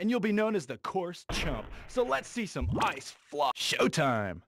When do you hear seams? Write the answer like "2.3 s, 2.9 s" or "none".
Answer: 3.5 s